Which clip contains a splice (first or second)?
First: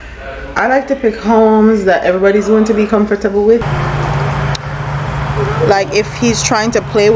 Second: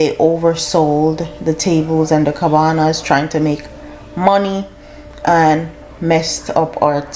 first